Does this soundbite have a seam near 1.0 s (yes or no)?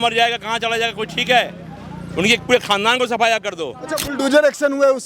no